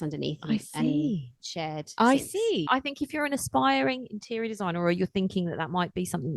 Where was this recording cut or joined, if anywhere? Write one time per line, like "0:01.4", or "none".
0:02.7